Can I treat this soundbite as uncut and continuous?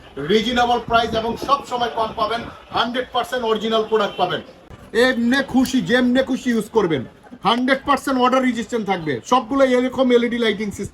no; 1 cut; at 4.6 s

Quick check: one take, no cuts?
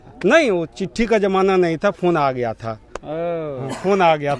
yes; 0 cuts

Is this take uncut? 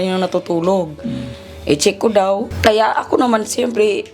no; 1 cut; at 2.5 s

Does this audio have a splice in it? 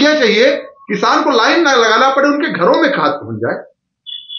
no; 0 cuts

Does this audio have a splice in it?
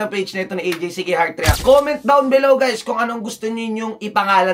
yes; 1 cut; at 1.6 s

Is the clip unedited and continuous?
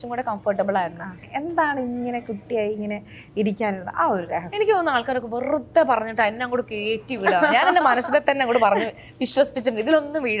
no; 1 cut; at 1.3 s

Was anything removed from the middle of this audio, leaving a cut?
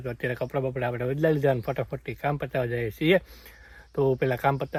no; 0 cuts

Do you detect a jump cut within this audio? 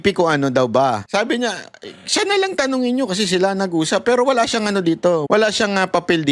yes; 2 cuts; at 1.0 s, 5.2 s

